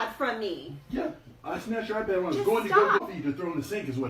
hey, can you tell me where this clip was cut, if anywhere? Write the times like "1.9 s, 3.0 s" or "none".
3.0 s